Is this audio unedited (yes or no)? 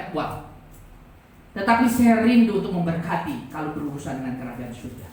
yes